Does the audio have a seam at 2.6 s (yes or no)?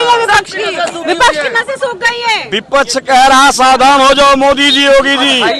no